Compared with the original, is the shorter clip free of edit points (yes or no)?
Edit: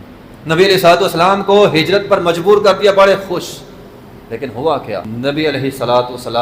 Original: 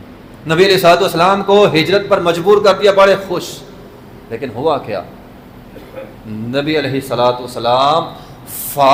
no